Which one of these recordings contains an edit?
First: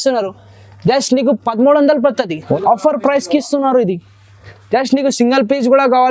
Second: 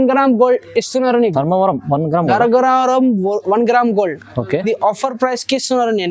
first; 1 cut; at 2.6 s

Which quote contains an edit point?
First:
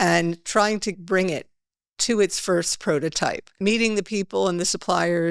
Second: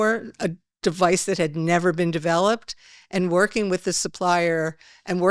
first; 2 cuts; at 0.9 s, 3.6 s

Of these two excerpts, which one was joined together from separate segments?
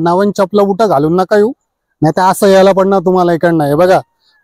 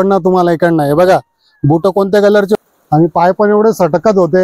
second; 1 cut; at 2.6 s

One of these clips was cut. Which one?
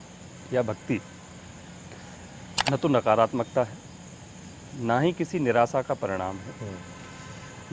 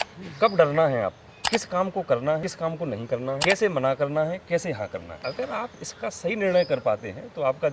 second; 3 cuts; at 1.3 s, 3.0 s, 5.1 s

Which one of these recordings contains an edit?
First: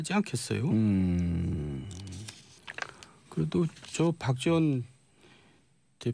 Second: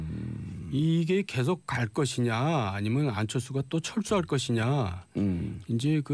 second; 1 cut; at 2.4 s

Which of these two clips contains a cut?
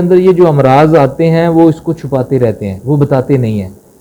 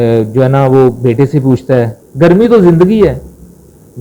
second; 1 cut; at 2.0 s

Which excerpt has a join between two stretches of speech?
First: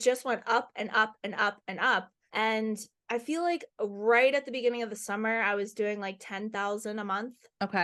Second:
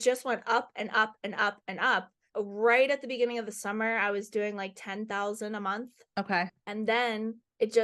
second; 1 cut; at 2.2 s

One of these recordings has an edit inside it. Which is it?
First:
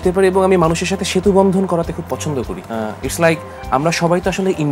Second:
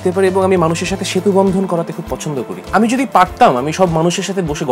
second; 1 cut; at 2.6 s

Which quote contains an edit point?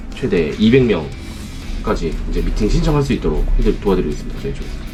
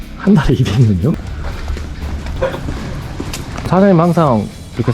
second; 2 cuts; at 1.1 s, 3.7 s

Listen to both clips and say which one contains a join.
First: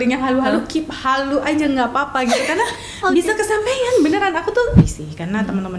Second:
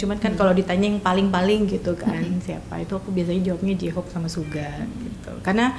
first; 1 cut; at 4.8 s

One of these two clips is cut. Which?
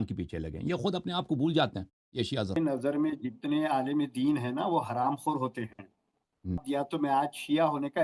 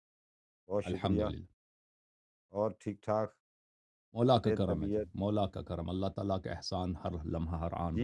first; 2 cuts; at 2.6 s, 6.6 s

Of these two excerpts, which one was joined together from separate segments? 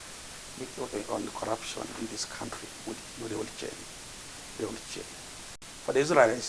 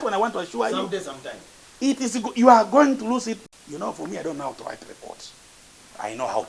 second; 1 cut; at 3.4 s

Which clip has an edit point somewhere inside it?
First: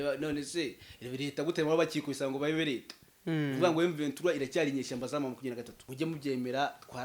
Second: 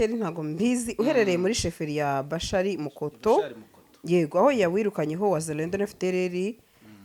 first; 1 cut; at 5.8 s

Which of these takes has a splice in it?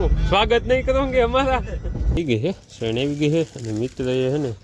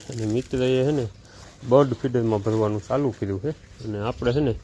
first; 1 cut; at 2.2 s

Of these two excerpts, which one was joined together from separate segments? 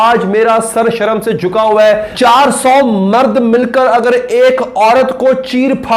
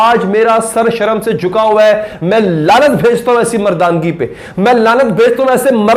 first; 1 cut; at 2.1 s

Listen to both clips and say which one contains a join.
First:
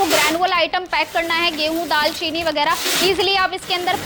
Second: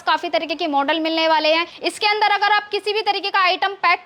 second; 1 cut; at 1.8 s

